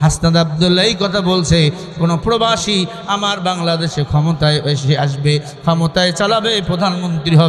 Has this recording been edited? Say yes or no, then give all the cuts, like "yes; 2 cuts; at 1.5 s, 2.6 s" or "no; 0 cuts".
no; 0 cuts